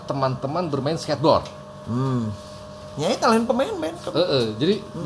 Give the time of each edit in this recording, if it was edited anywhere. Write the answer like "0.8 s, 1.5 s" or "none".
none